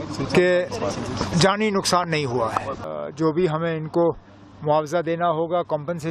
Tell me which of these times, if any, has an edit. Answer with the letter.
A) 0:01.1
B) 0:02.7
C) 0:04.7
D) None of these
B